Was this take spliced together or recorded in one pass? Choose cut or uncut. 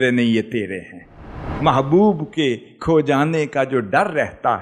cut